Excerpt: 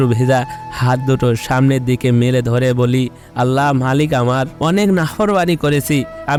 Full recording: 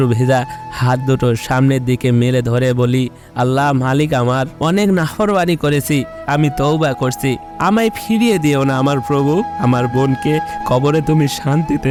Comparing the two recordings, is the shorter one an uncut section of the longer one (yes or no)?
yes